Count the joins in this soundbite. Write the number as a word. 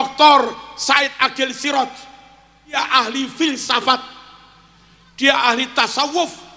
one